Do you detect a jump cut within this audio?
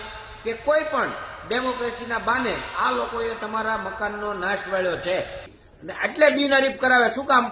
yes; 1 cut; at 5.6 s

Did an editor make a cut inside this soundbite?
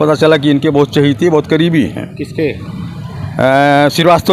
no; 0 cuts

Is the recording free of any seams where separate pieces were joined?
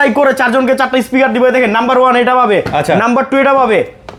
yes; 0 cuts

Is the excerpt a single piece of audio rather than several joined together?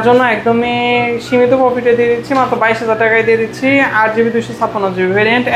yes; 0 cuts

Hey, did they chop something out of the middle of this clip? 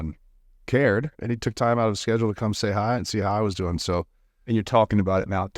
yes; 3 cuts; at 1.1 s, 3.0 s, 4.3 s

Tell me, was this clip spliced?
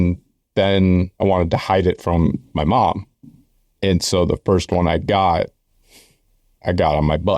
yes; 1 cut; at 1.1 s

